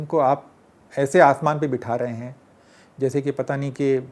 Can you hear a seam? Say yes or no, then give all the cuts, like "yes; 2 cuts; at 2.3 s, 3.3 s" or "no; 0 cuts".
no; 0 cuts